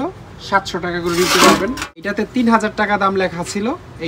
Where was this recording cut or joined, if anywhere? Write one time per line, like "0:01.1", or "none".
0:02.1